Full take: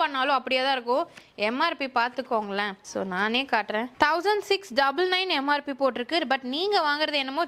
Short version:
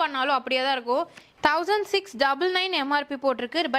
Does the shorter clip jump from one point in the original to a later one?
yes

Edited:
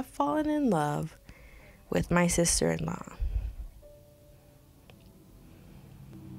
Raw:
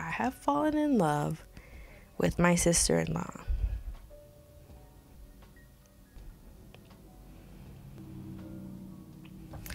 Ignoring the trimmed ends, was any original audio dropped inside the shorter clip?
yes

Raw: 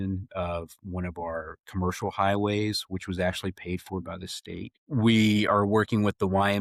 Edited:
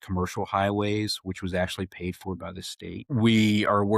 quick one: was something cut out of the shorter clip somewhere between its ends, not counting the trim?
yes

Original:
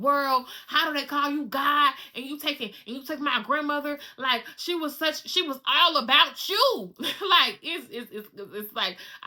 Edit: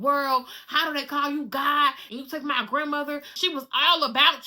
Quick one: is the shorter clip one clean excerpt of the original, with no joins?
no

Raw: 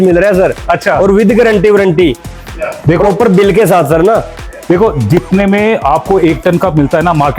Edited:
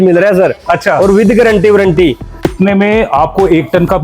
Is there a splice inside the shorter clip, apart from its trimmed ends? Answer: yes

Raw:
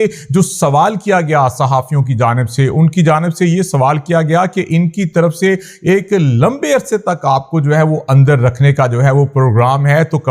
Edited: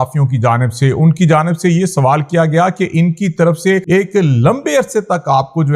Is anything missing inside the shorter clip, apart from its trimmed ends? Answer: yes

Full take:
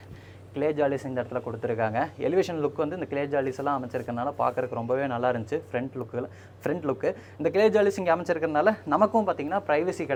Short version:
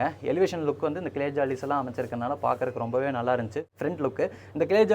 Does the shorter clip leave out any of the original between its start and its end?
yes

